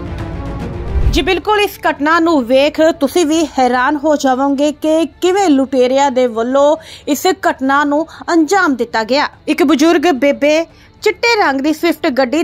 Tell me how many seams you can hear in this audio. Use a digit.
1